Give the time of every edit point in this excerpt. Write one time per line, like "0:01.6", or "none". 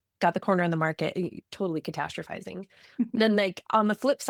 none